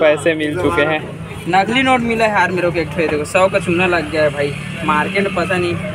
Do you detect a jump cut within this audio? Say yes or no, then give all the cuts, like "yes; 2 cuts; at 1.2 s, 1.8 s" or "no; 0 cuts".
no; 0 cuts